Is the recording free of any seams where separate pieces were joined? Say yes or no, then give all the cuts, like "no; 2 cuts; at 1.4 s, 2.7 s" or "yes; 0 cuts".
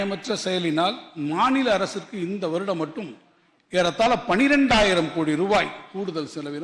yes; 0 cuts